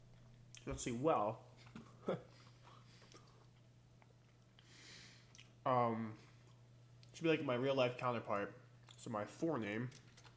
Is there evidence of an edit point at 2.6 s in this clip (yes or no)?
no